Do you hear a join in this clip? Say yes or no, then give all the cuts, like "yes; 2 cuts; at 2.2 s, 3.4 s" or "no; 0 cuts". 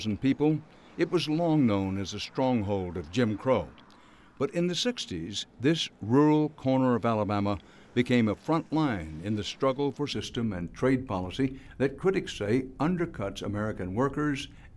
no; 0 cuts